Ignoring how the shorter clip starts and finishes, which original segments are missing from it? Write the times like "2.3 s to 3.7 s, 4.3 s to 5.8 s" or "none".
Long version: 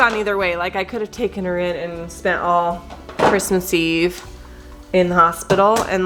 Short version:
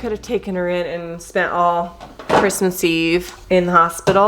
4.2 s to 4.8 s